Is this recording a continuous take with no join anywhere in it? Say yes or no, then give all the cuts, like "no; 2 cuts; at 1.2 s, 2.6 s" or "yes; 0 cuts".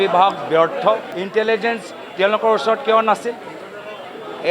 no; 1 cut; at 1.1 s